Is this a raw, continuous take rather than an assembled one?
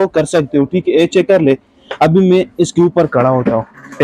yes; 0 cuts

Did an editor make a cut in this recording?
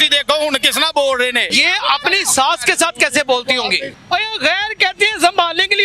yes; 2 cuts; at 1.6 s, 3.9 s

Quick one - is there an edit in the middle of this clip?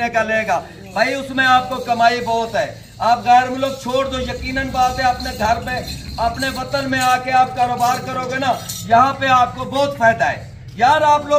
no; 0 cuts

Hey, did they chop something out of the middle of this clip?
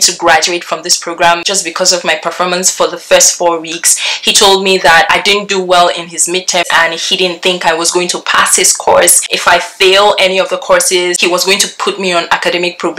yes; 4 cuts; at 1.5 s, 6.7 s, 9.3 s, 11.2 s

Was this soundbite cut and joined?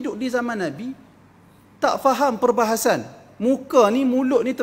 no; 0 cuts

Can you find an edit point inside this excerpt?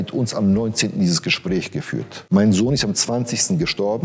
yes; 1 cut; at 2.1 s

